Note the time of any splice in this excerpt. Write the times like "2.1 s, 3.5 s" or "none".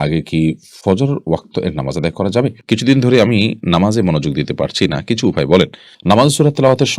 2.6 s, 5.9 s